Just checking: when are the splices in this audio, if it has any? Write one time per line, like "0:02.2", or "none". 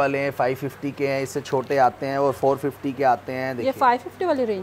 none